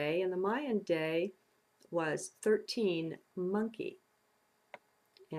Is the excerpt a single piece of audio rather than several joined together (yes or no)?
yes